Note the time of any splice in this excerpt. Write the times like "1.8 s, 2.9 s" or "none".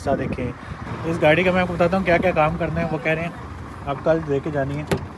0.9 s